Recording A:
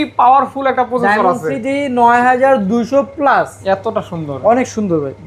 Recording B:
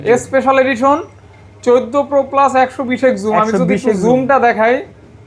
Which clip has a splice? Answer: A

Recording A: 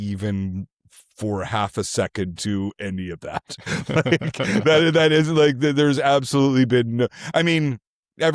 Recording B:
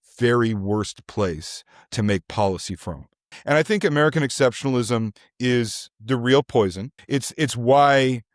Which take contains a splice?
B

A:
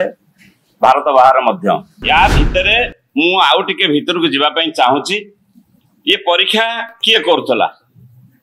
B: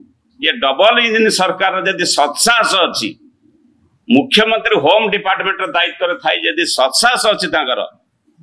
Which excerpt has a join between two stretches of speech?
A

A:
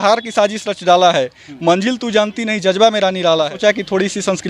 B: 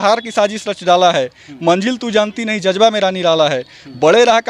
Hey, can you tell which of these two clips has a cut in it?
A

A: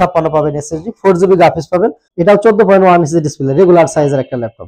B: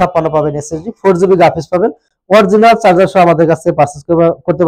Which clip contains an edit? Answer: A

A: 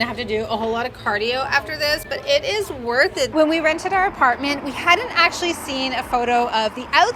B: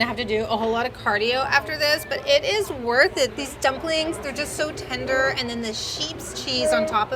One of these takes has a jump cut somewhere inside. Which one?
A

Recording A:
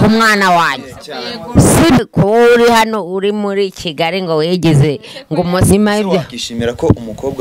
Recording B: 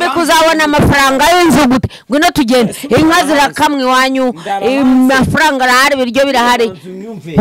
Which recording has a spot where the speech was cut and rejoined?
A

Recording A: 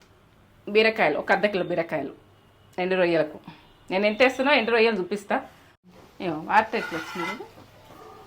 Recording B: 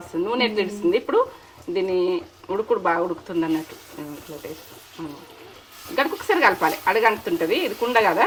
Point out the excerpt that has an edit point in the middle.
A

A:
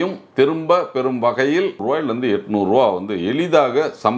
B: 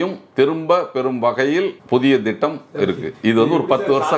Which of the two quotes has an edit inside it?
A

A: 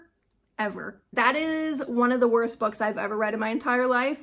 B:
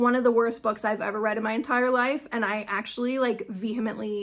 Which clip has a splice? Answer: A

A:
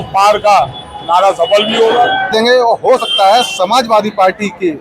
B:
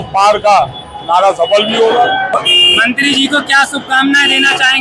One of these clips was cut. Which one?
A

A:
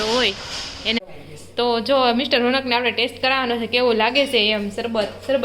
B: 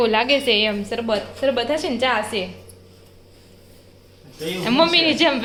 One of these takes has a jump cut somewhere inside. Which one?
A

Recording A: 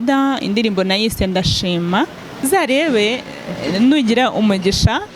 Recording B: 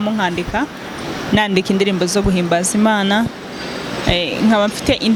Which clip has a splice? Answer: A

